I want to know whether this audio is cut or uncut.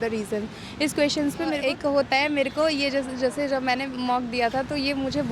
cut